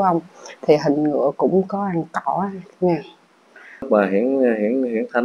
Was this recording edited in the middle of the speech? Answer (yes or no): yes